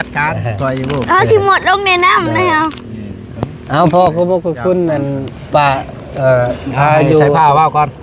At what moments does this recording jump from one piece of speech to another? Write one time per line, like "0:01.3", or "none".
none